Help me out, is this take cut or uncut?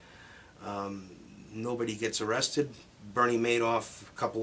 uncut